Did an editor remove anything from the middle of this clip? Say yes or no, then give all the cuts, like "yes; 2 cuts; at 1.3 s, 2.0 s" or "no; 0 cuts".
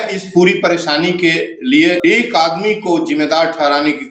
yes; 1 cut; at 2.0 s